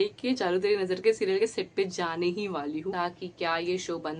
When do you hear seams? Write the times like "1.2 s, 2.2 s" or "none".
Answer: 2.9 s